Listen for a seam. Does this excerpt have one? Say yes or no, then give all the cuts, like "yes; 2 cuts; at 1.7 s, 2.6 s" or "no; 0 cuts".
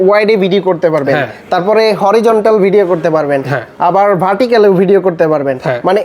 no; 0 cuts